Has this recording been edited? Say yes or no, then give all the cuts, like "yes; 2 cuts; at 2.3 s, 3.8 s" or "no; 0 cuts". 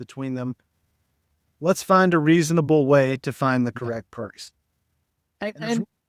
no; 0 cuts